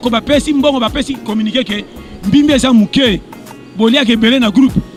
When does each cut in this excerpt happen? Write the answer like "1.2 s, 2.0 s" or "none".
none